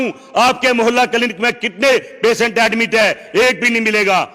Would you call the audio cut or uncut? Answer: uncut